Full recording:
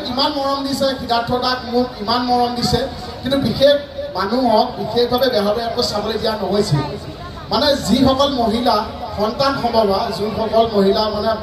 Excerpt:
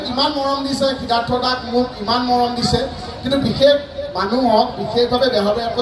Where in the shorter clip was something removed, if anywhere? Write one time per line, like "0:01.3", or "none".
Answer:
none